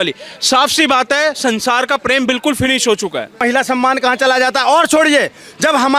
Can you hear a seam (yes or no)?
yes